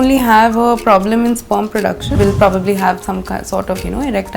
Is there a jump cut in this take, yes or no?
yes